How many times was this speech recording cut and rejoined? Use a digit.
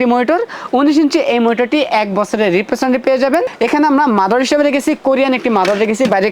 1